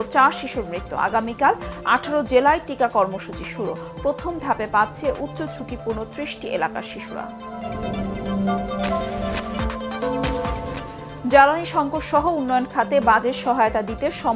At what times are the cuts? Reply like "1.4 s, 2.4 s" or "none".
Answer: none